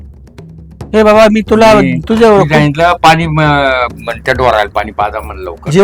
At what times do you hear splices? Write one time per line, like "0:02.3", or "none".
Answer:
none